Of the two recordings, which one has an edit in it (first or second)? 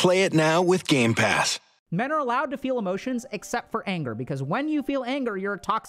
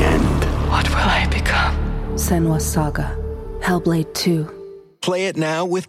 first